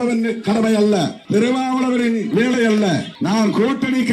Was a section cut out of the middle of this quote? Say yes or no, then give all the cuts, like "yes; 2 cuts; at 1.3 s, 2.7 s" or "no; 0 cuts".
yes; 2 cuts; at 1.2 s, 3.1 s